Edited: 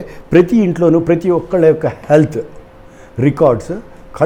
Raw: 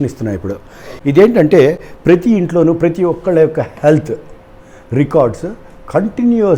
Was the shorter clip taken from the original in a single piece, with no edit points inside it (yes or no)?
yes